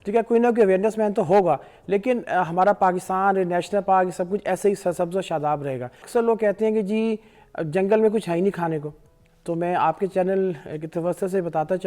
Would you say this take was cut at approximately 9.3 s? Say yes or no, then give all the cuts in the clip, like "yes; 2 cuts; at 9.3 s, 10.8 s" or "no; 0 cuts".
no; 1 cut; at 6.0 s